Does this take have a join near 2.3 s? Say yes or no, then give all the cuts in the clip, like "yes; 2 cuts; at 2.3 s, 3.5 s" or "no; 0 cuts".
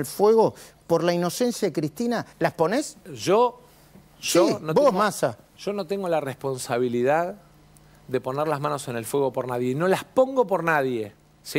yes; 1 cut; at 2.3 s